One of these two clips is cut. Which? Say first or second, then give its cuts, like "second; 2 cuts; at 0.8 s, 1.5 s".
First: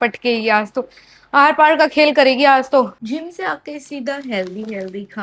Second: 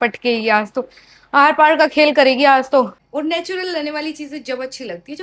second; 1 cut; at 3.0 s